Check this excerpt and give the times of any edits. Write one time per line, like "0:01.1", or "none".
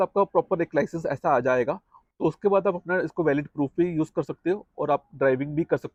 none